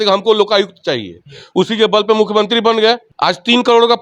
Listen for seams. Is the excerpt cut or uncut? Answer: cut